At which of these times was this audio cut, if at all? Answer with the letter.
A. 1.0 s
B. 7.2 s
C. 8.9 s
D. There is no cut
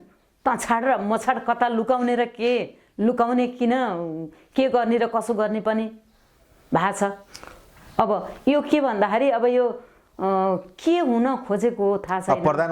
D